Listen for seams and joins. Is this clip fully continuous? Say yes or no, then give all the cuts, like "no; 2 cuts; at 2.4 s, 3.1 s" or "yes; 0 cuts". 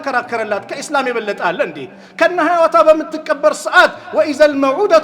yes; 0 cuts